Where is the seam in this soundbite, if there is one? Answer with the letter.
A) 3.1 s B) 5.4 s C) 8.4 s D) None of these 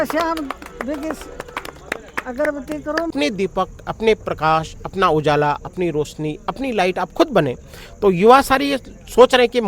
A